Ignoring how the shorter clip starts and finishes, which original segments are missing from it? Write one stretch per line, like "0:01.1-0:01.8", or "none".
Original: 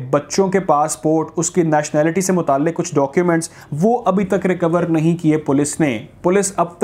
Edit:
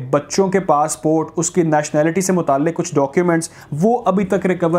none